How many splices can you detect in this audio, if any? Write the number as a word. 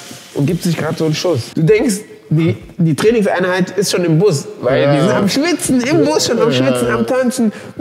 one